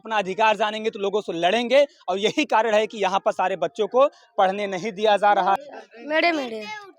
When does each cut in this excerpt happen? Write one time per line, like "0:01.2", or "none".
0:05.7